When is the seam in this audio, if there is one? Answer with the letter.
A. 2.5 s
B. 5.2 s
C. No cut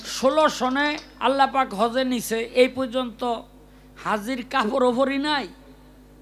C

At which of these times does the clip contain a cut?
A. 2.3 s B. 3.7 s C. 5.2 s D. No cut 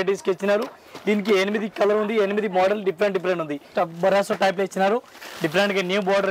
B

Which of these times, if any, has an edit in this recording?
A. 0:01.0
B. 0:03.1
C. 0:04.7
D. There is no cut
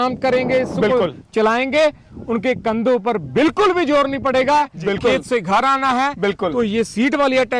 C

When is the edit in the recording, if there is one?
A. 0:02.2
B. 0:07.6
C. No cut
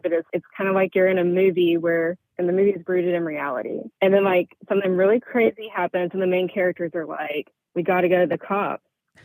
A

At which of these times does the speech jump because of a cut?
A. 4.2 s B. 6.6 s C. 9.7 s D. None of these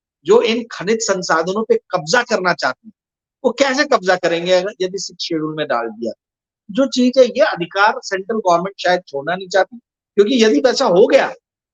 B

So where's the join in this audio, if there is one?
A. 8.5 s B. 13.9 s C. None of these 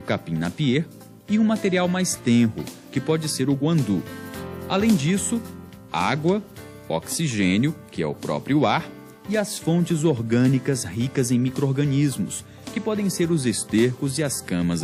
C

